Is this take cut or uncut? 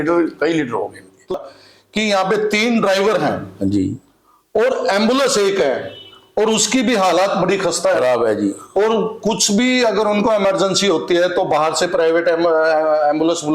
cut